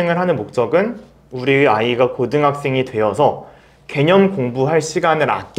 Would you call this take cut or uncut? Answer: uncut